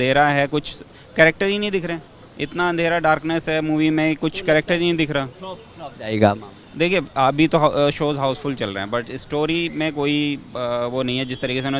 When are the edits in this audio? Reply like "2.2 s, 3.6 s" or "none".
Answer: none